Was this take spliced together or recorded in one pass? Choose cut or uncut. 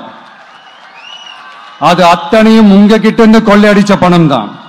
uncut